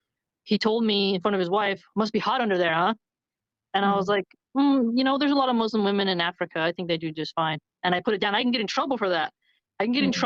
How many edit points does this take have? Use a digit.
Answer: 0